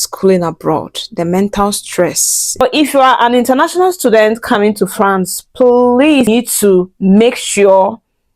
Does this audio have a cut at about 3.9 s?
no; 2 cuts; at 2.6 s, 6.3 s

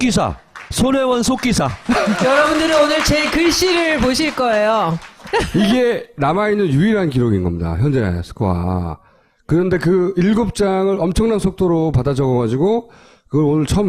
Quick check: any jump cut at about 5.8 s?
yes; 1 cut; at 5.8 s

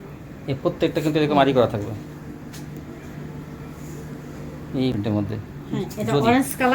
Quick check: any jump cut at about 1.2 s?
no; 1 cut; at 4.9 s

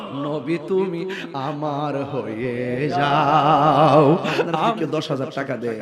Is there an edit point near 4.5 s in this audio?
yes; 1 cut; at 4.5 s

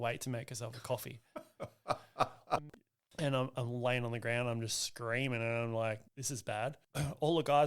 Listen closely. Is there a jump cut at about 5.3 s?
no; 2 cuts; at 2.6 s, 6.6 s

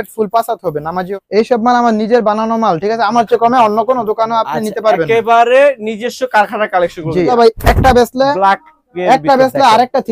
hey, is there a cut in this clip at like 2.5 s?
no; 2 cuts; at 1.1 s, 7.3 s

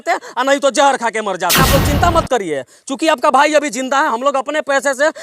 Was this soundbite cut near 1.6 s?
yes; 1 cut; at 1.6 s

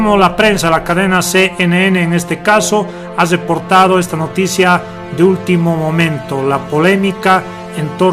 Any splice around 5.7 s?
yes; 1 cut; at 5.7 s

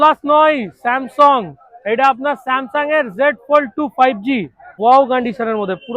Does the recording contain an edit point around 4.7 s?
yes; 1 cut; at 4.7 s

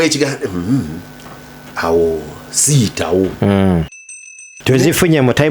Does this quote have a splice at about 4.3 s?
yes; 1 cut; at 4.3 s

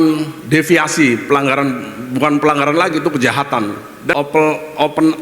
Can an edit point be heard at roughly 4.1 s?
yes; 1 cut; at 4.1 s

